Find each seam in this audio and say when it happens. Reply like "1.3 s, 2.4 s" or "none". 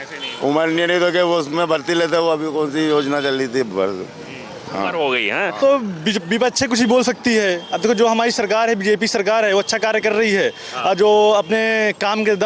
5.6 s